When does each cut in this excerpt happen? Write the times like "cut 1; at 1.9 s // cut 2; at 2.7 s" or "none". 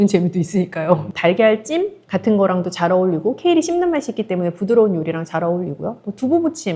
cut 1; at 1.1 s